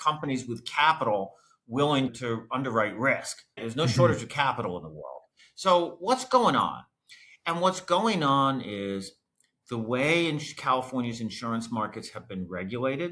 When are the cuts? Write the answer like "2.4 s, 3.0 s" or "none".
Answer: 3.6 s